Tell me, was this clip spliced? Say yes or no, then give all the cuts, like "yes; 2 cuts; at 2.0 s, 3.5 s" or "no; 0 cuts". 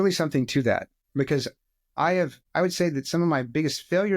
yes; 2 cuts; at 1.0 s, 2.4 s